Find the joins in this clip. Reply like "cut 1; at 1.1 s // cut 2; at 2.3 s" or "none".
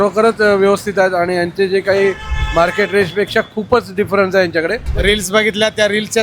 cut 1; at 4.9 s